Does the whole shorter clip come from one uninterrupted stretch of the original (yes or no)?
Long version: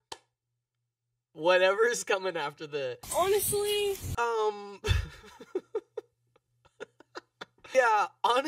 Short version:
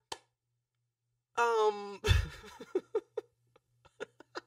no